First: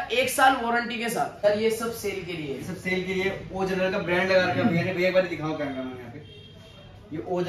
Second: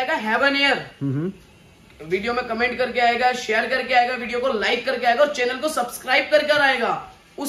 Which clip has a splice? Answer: first; 1 cut; at 1.4 s

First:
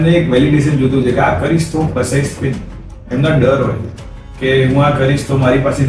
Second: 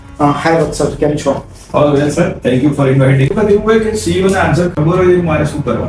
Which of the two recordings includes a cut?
second; 1 cut; at 3.3 s

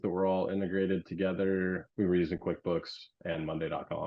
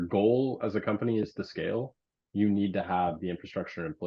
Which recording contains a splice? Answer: first; 1 cut; at 1.9 s

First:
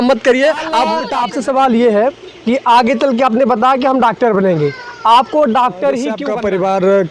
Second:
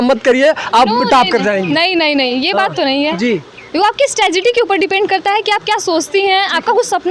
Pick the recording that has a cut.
first; 2 cuts; at 1.0 s, 6.2 s

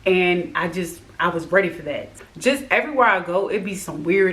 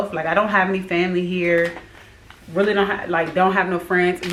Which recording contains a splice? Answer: first; 1 cut; at 2.1 s

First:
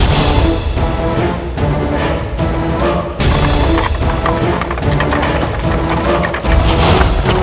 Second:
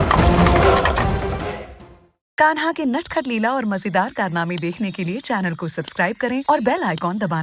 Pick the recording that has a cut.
second; 1 cut; at 1.9 s

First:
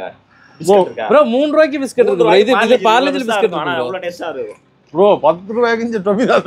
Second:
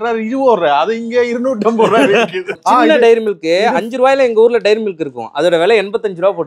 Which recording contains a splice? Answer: second; 1 cut; at 2.6 s

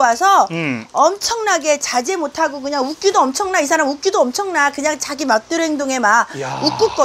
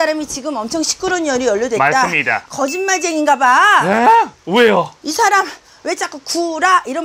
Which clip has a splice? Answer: second; 1 cut; at 2.4 s

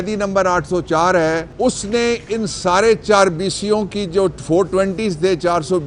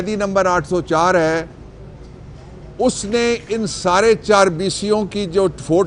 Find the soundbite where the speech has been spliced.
first; 1 cut; at 1.5 s

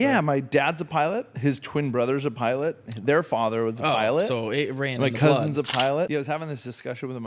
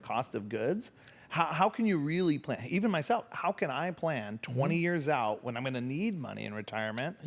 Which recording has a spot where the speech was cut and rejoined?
first; 1 cut; at 6.1 s

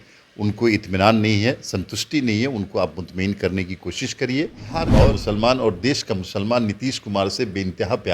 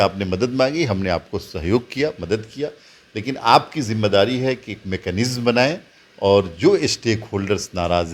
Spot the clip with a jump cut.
first; 1 cut; at 4.9 s

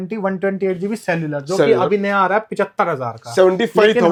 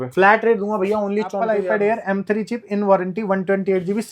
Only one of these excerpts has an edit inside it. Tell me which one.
second; 1 cut; at 1.4 s

